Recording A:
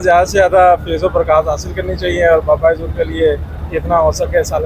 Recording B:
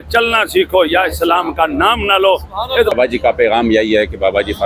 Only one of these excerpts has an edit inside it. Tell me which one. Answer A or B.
B